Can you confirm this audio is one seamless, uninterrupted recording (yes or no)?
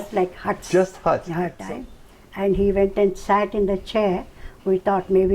no